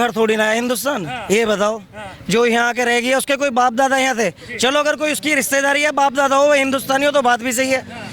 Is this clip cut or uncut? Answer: uncut